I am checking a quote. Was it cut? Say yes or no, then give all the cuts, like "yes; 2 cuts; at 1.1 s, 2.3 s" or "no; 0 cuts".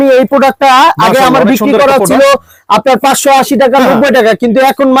no; 0 cuts